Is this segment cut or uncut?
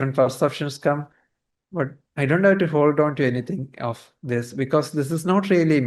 uncut